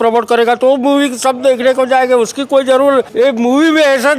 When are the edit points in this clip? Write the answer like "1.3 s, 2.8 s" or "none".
3.1 s

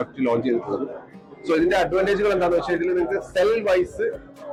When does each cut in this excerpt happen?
none

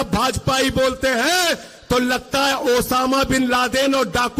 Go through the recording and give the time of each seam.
none

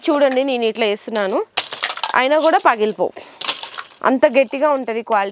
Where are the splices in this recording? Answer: none

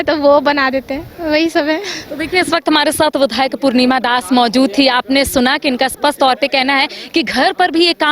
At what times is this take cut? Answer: none

